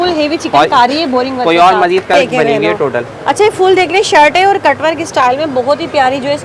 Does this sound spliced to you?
yes; 1 cut; at 2.1 s

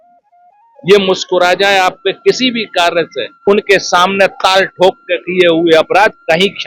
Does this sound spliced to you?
yes; 1 cut; at 3.4 s

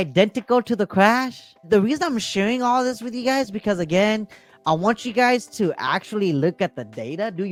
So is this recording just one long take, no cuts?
yes; 0 cuts

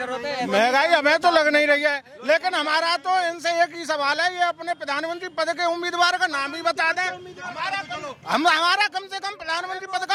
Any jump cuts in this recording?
no; 0 cuts

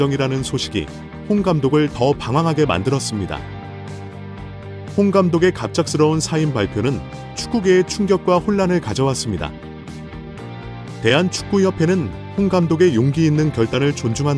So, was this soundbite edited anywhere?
yes; 2 cuts; at 9.5 s, 10.8 s

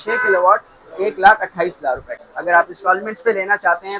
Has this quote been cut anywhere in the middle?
yes; 1 cut; at 2.2 s

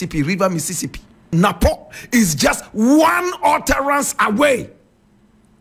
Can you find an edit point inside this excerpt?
yes; 1 cut; at 1.3 s

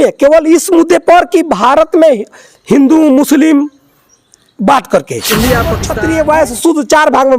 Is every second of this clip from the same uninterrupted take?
no; 1 cut; at 5.9 s

